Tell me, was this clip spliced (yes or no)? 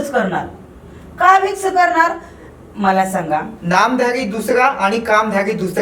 yes